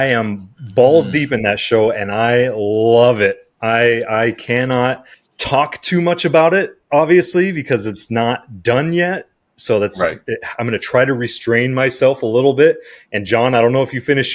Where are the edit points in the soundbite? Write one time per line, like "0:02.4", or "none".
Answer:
none

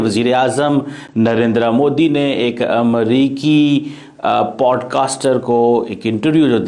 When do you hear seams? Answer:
none

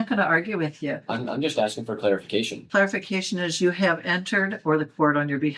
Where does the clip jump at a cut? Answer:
none

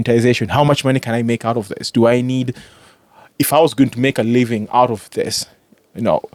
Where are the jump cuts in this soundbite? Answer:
none

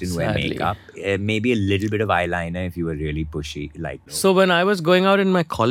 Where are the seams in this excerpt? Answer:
0:04.1

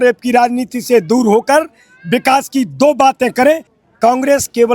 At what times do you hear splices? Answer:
0:03.7

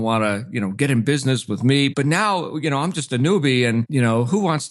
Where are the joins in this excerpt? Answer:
none

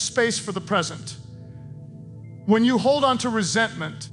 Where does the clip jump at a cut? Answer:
0:01.0
0:02.4

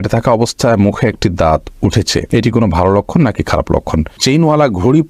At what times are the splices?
0:02.3
0:04.2

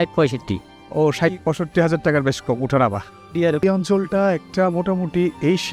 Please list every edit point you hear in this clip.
0:03.6

